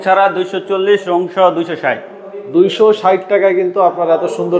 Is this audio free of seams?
yes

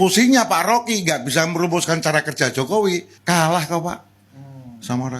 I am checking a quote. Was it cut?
yes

